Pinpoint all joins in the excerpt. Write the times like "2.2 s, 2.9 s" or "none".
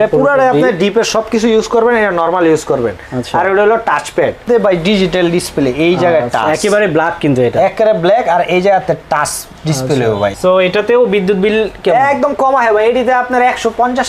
4.4 s, 10.3 s

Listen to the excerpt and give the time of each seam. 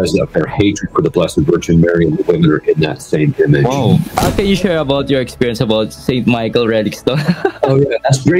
4.1 s

